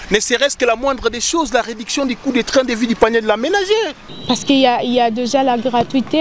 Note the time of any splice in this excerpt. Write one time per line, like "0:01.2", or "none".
0:04.0